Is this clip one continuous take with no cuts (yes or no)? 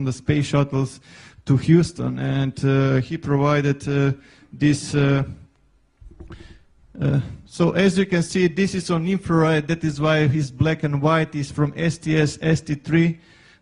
no